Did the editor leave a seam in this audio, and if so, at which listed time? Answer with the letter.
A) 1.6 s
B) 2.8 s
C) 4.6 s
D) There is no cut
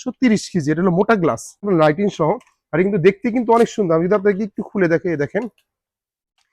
A